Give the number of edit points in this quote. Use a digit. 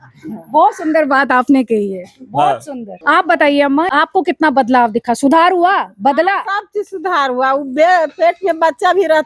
2